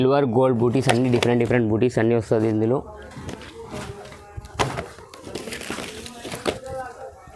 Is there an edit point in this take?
no; 0 cuts

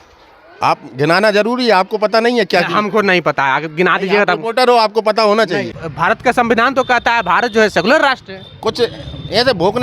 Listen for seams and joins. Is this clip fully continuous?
no; 1 cut; at 5.8 s

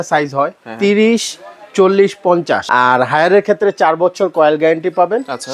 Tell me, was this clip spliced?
yes; 1 cut; at 2.6 s

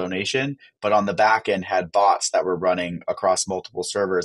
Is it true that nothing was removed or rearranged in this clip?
yes; 0 cuts

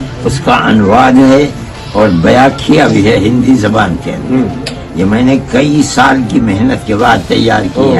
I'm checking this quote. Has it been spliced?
no; 0 cuts

